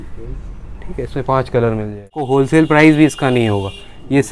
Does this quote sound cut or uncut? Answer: cut